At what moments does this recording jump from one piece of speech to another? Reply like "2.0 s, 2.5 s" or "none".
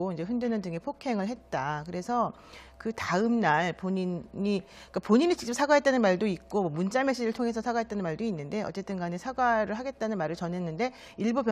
none